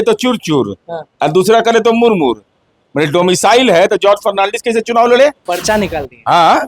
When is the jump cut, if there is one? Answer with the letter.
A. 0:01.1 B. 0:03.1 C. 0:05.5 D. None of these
C